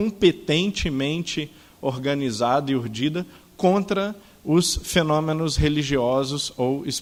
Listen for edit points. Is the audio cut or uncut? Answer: uncut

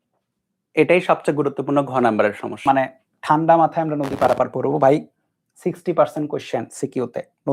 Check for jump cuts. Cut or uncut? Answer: cut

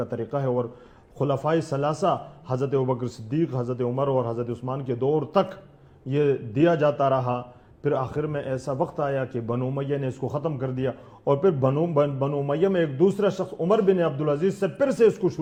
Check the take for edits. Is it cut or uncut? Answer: uncut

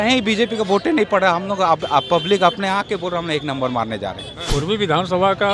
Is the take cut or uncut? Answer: cut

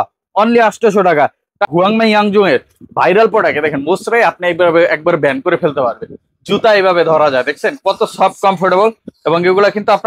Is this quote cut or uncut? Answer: cut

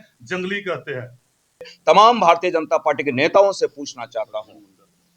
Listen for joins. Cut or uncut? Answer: cut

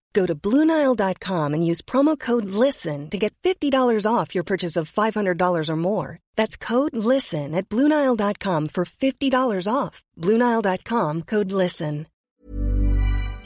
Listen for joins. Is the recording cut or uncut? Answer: cut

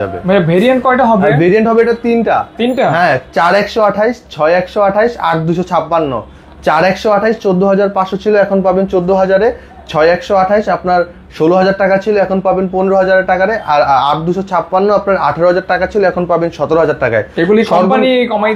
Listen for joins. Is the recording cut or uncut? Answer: uncut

